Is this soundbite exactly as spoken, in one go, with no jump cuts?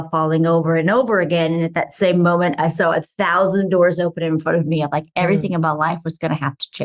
yes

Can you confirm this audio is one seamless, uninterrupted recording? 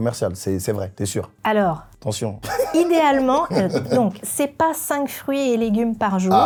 yes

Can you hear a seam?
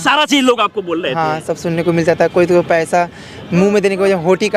no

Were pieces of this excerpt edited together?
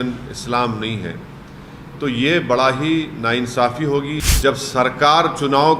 yes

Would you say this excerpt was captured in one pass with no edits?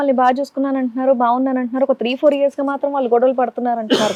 yes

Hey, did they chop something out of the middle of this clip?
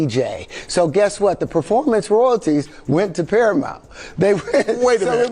yes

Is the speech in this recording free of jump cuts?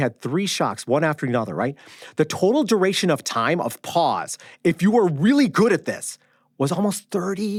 yes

